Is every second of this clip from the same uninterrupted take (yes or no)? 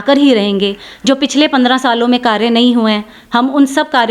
yes